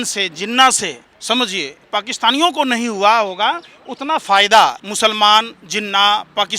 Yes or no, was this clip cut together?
yes